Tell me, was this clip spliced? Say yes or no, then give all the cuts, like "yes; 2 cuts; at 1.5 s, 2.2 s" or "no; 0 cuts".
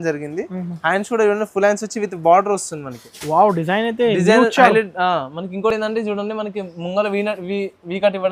no; 0 cuts